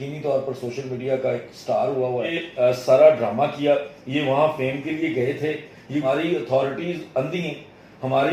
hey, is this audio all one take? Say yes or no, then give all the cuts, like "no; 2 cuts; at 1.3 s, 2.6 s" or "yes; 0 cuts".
no; 2 cuts; at 2.4 s, 6.0 s